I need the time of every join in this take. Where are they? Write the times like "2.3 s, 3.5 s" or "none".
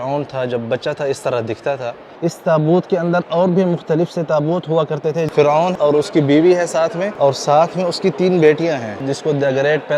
2.1 s, 5.7 s, 7.0 s, 9.0 s